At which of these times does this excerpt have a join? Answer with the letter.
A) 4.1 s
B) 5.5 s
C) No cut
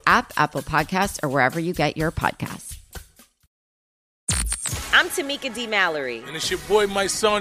A